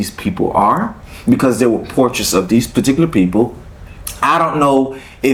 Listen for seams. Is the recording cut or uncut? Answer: uncut